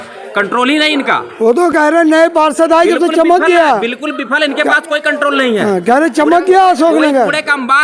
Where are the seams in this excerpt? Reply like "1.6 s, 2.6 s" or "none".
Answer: none